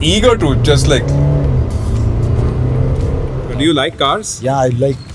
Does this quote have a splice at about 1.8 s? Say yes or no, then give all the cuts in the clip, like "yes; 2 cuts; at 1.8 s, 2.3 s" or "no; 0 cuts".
no; 1 cut; at 3.1 s